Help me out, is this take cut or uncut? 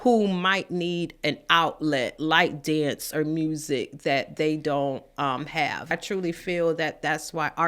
cut